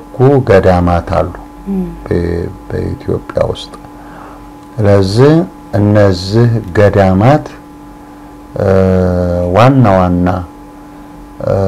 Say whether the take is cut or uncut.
uncut